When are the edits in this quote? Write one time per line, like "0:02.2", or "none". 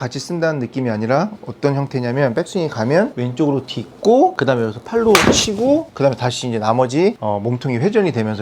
0:03.2
0:04.4
0:05.9
0:07.2